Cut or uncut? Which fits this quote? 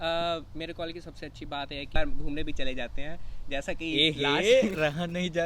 cut